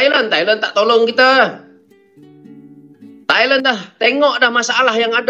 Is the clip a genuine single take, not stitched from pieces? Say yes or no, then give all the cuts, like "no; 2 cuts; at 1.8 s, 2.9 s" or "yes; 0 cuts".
yes; 0 cuts